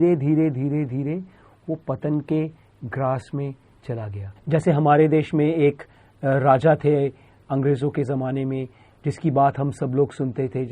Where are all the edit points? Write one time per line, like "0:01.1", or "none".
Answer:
0:04.3